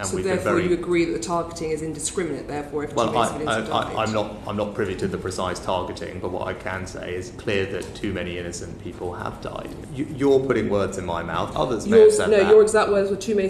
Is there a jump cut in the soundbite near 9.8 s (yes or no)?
yes